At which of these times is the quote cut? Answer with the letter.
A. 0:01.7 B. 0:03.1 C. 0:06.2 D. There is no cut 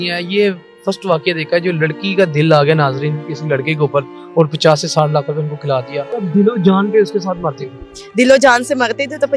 C